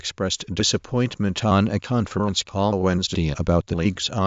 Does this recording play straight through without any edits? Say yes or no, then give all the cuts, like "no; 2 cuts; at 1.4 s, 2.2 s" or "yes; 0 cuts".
yes; 0 cuts